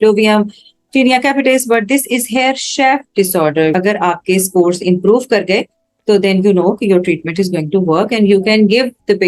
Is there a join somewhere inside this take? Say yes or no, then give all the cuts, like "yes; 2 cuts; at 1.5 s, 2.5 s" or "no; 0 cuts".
yes; 1 cut; at 3.7 s